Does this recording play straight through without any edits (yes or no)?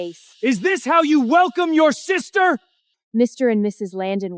no